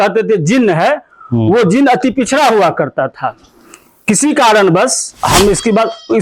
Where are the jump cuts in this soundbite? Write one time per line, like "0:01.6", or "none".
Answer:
0:05.1